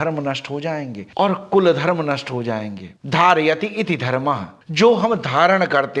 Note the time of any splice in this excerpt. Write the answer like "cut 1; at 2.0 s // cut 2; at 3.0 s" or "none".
cut 1; at 2.9 s